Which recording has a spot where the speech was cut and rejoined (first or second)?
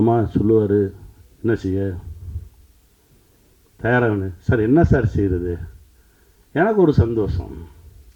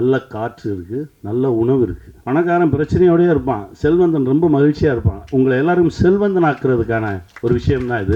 second